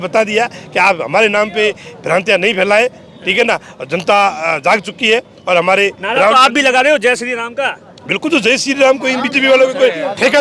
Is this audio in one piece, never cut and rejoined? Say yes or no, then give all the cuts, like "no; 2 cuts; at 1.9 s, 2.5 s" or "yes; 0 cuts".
yes; 0 cuts